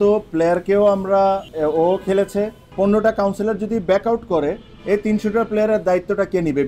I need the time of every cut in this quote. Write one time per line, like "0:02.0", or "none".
0:01.5
0:02.6